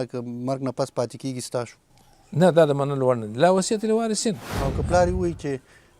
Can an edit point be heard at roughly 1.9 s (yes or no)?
yes